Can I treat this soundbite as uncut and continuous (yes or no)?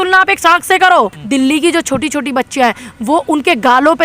no